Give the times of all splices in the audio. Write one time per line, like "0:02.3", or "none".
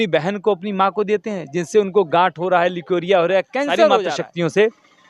0:04.2